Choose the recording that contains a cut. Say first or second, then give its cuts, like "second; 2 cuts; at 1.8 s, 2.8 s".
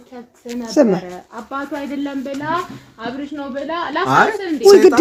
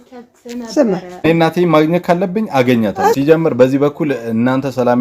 second; 2 cuts; at 1.2 s, 3.2 s